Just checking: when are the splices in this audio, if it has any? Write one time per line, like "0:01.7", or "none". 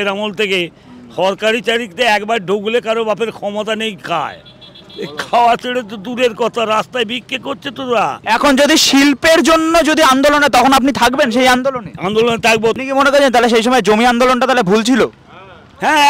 0:08.2
0:12.8